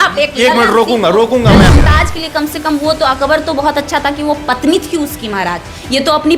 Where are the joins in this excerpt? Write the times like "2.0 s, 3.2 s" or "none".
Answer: 1.7 s